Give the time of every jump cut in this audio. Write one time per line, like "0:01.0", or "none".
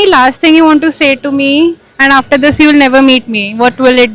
none